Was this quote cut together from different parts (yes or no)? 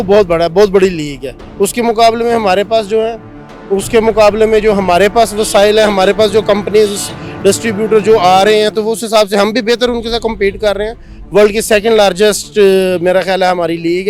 no